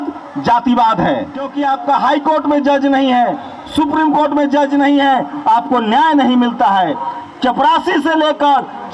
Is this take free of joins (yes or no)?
no